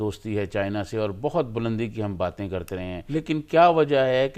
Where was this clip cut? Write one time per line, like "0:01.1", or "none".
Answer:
0:02.9